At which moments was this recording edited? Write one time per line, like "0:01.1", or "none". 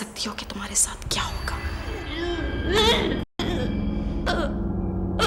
none